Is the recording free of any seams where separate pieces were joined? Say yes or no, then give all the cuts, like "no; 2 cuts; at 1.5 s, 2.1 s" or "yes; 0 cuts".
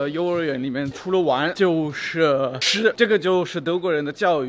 no; 2 cuts; at 1.2 s, 2.9 s